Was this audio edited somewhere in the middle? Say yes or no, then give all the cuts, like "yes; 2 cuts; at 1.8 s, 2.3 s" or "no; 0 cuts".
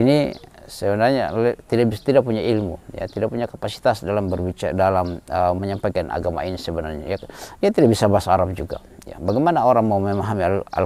no; 0 cuts